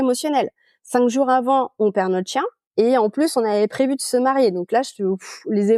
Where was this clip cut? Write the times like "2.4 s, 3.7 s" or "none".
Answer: 2.6 s